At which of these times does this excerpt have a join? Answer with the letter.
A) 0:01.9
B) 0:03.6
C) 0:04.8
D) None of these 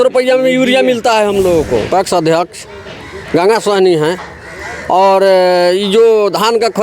A